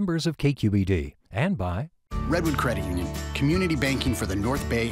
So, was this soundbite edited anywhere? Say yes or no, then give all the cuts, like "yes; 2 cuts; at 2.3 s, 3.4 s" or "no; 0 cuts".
yes; 1 cut; at 2.0 s